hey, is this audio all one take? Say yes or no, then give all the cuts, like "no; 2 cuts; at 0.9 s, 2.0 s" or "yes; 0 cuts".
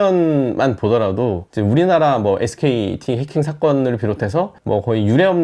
yes; 0 cuts